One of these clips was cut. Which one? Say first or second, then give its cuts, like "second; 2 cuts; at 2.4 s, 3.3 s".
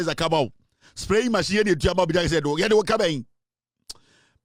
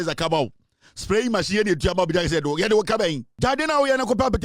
second; 1 cut; at 3.3 s